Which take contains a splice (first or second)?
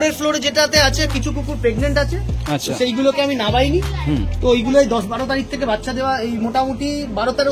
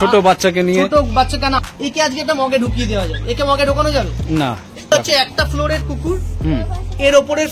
second